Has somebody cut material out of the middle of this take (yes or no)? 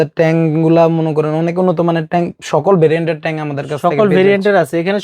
no